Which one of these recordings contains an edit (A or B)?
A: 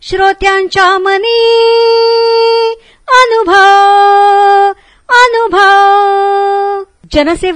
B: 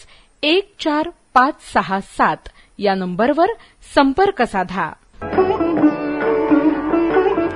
B